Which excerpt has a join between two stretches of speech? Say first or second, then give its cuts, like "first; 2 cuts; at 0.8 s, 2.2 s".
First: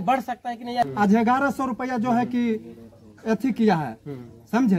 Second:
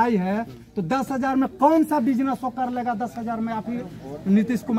first; 1 cut; at 0.9 s